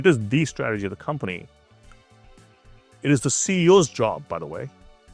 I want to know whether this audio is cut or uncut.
uncut